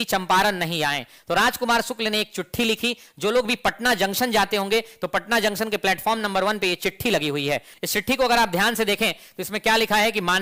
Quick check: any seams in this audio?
no; 0 cuts

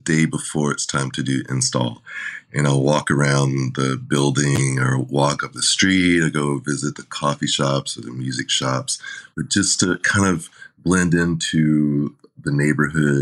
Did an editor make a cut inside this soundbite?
no; 0 cuts

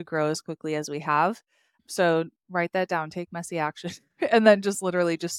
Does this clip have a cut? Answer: no; 0 cuts

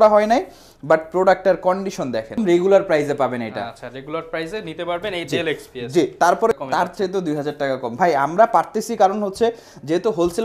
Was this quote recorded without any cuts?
no; 2 cuts; at 2.3 s, 6.6 s

